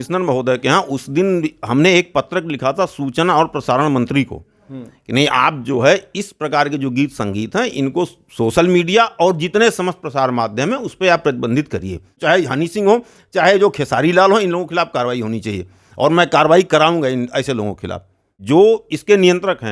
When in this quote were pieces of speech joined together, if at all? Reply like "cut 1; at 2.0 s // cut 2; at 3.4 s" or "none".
cut 1; at 12.1 s // cut 2; at 18.3 s